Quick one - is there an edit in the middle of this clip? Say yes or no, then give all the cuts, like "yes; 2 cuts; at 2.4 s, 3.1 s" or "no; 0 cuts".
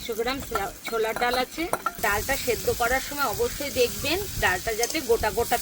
yes; 1 cut; at 2.0 s